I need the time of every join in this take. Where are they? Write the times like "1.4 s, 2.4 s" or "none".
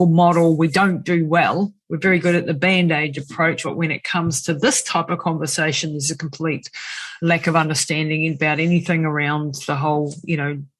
3.6 s